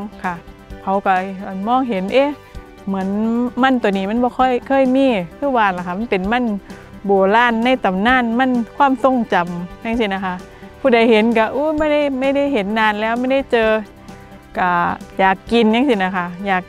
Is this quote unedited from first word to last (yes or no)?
yes